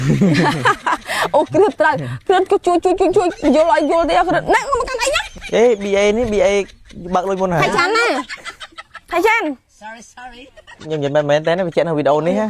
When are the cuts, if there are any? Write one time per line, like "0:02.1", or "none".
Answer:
0:05.3
0:10.8